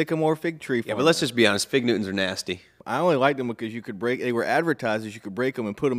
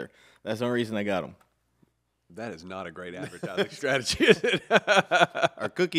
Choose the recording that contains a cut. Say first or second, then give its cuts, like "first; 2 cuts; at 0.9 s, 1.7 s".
first; 1 cut; at 2.7 s